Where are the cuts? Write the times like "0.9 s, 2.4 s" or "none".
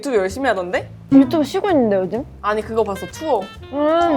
0.9 s, 2.3 s